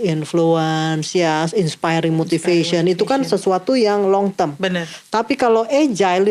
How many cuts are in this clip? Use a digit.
0